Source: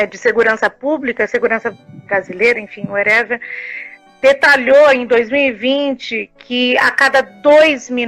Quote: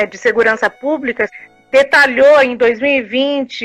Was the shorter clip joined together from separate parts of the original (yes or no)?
yes